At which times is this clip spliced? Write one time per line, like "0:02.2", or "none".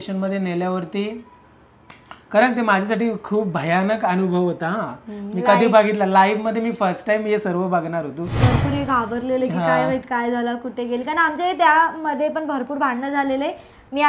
0:08.4